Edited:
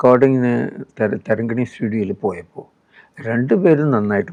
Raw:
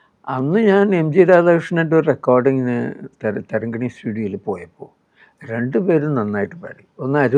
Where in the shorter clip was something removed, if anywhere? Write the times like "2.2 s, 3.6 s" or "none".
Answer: none